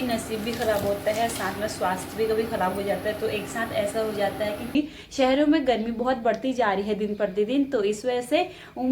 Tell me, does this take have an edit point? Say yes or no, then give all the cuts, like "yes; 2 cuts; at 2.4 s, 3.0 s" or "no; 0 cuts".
yes; 1 cut; at 4.7 s